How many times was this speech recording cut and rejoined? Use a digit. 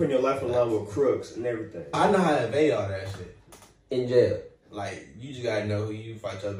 1